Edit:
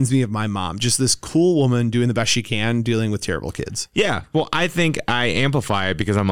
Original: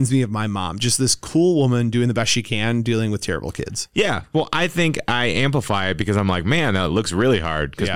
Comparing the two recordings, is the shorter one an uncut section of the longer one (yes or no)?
yes